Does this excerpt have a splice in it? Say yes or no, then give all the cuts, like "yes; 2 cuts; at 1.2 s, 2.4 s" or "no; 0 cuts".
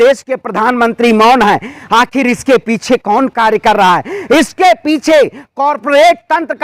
no; 0 cuts